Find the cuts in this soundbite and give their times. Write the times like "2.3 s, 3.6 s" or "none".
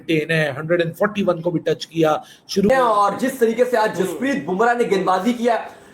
2.7 s